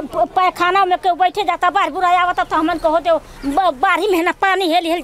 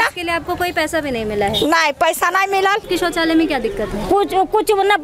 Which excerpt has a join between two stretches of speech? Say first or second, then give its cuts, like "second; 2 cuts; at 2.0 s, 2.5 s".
second; 1 cut; at 2.9 s